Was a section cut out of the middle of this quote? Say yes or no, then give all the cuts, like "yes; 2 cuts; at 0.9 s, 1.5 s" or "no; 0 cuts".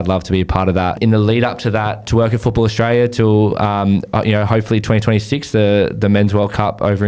yes; 2 cuts; at 1.0 s, 2.0 s